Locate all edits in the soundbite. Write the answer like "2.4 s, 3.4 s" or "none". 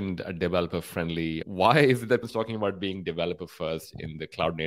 1.4 s, 2.2 s